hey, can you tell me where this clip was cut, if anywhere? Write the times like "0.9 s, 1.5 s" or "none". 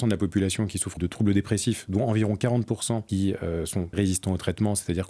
0.9 s, 3.1 s, 3.9 s